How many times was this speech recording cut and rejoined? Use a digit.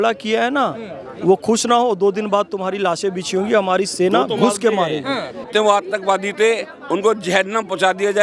1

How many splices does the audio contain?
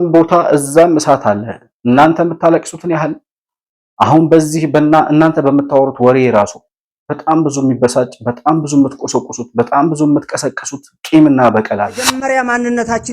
1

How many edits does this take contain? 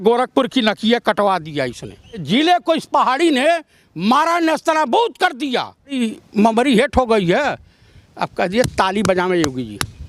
2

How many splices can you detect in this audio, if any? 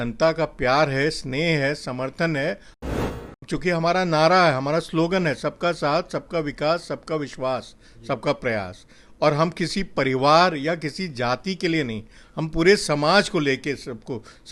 1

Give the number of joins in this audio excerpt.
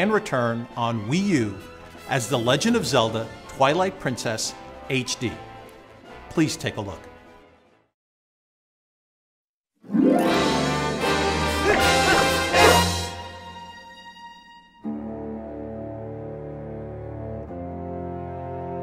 1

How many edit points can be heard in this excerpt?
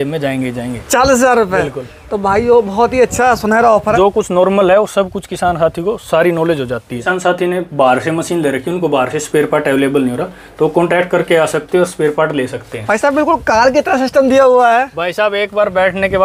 3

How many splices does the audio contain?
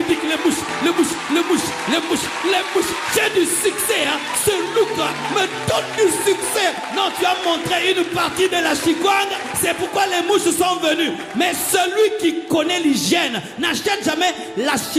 0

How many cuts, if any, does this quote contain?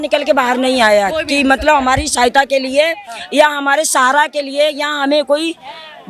0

